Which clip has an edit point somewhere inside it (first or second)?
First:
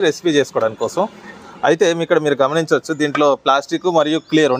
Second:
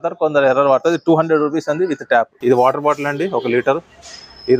second